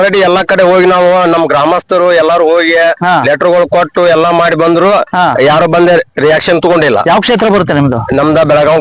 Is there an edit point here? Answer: no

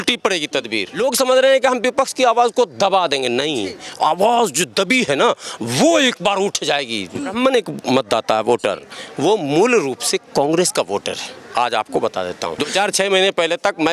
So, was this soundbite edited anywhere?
yes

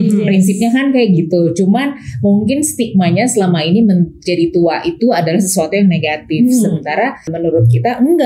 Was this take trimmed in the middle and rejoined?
yes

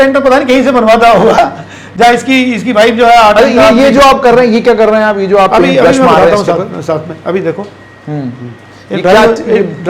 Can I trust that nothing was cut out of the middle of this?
yes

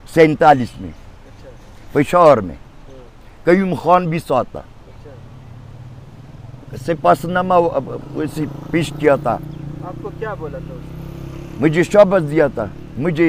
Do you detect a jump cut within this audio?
no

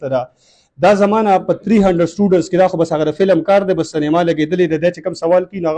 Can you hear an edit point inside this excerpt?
no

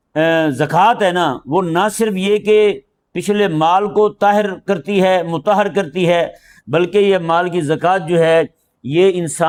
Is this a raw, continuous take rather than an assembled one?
yes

